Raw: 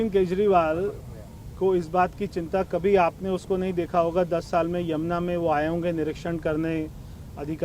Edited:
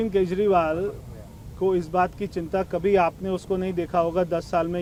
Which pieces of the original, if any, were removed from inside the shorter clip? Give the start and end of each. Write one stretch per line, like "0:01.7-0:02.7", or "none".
none